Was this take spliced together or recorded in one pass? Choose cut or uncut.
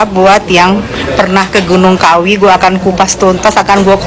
uncut